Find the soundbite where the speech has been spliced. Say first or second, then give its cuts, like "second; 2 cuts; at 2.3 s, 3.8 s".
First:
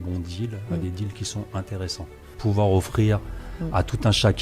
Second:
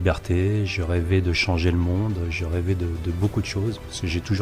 first; 1 cut; at 2.3 s